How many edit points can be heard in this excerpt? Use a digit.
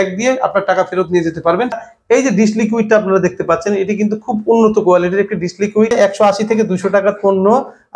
2